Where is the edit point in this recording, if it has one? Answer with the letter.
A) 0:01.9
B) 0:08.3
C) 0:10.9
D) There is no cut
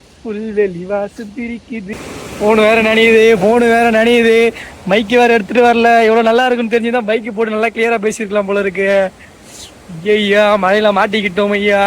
A